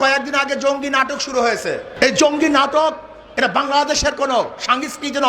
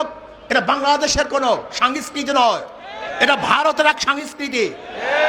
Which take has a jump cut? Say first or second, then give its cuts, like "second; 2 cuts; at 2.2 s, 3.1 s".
first; 1 cut; at 1.9 s